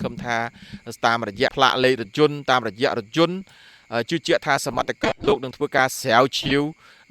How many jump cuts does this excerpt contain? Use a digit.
1